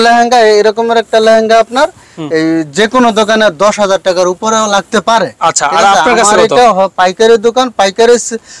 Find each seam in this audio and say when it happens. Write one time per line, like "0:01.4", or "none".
none

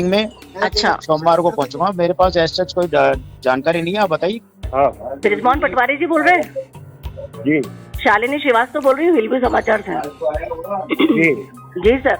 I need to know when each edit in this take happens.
0:04.4

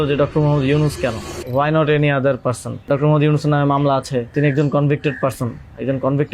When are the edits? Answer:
0:01.3
0:02.9
0:04.3

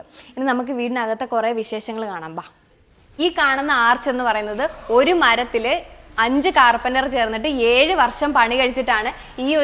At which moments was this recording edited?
0:03.1

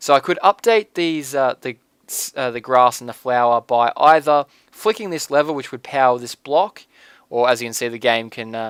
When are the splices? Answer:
none

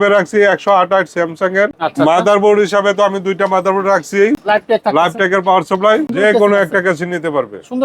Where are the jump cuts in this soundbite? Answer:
0:01.8
0:04.4
0:06.1

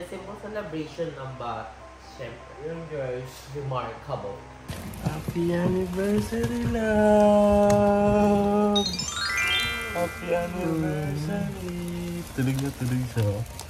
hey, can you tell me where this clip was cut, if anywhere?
0:04.6

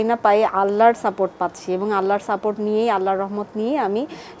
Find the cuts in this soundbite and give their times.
none

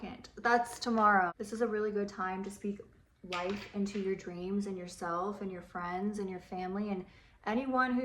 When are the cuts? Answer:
0:01.3

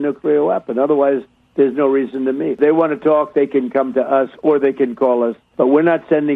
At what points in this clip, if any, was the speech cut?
0:02.6

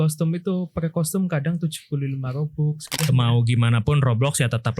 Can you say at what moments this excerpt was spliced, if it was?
0:03.0

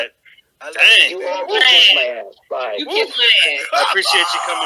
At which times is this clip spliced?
none

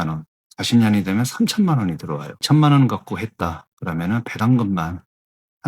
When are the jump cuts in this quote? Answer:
0:02.4

